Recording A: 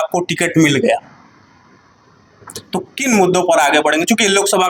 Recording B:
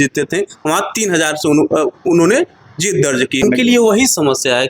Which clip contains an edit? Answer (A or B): B